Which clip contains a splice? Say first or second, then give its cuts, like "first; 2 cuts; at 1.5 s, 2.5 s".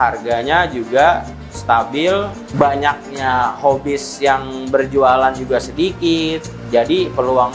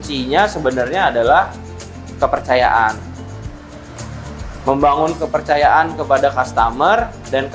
first; 1 cut; at 2.4 s